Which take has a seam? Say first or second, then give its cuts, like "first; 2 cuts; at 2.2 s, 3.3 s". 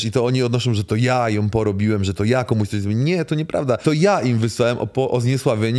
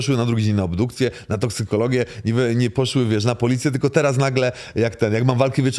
first; 1 cut; at 3.8 s